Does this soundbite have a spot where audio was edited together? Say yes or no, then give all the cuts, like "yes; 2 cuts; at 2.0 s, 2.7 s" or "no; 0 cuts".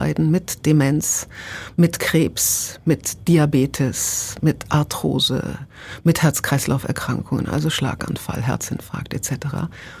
no; 0 cuts